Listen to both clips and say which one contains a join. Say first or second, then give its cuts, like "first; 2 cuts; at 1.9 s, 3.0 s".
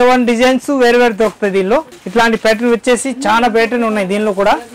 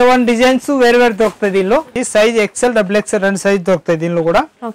second; 1 cut; at 2.0 s